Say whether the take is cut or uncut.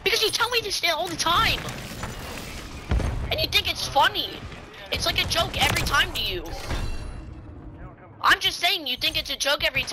uncut